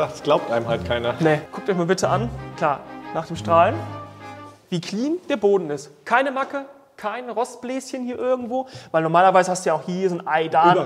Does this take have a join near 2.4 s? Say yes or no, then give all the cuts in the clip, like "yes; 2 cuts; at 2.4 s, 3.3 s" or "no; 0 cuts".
yes; 2 cuts; at 1.5 s, 2.4 s